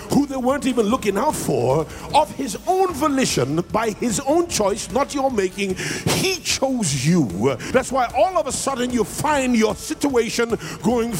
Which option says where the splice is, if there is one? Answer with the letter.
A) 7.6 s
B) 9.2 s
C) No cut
A